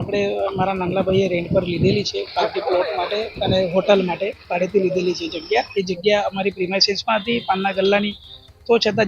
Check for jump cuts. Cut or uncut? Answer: cut